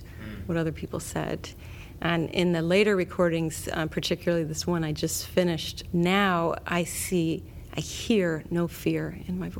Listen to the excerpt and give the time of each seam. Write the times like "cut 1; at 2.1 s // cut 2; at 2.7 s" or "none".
cut 1; at 5.7 s